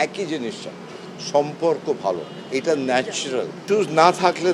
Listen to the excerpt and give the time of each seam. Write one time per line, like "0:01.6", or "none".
0:03.6